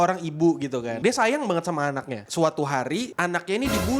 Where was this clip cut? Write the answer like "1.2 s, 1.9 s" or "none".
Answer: 0.9 s, 2.3 s, 3.1 s